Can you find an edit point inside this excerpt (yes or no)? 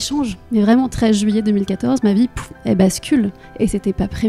no